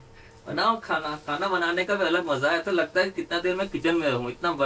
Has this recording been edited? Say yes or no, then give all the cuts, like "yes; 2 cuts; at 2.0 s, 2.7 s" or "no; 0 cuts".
no; 0 cuts